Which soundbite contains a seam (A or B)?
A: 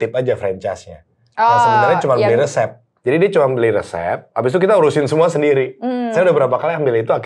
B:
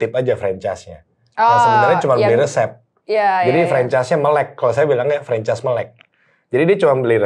A